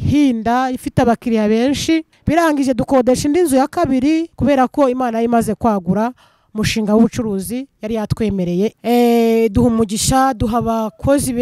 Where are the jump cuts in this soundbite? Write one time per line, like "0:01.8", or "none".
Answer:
0:02.1
0:04.3
0:08.8